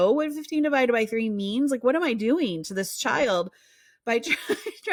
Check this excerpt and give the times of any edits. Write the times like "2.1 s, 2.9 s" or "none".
none